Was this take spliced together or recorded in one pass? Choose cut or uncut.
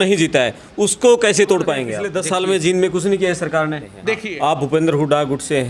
cut